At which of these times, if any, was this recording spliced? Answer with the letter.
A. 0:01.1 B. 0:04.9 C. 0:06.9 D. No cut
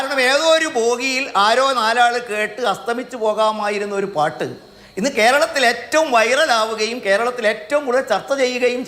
D